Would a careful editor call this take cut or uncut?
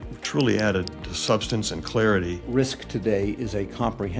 cut